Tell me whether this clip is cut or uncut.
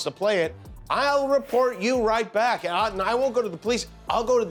uncut